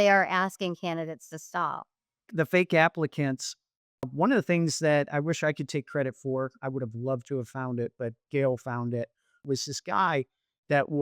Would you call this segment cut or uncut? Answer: cut